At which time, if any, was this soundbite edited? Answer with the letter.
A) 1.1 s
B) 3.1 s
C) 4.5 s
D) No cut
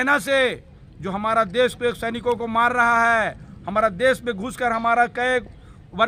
D